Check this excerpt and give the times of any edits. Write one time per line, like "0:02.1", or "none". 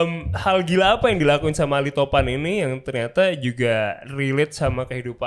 none